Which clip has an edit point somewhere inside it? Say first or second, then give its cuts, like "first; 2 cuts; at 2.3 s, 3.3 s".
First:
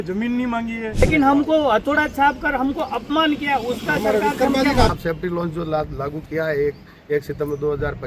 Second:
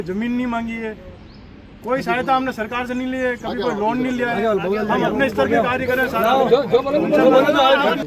first; 2 cuts; at 1.0 s, 4.9 s